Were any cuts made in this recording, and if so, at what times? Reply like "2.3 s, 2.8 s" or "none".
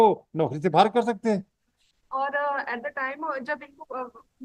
none